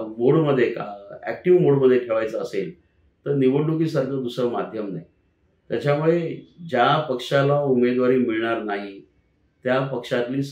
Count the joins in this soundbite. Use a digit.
0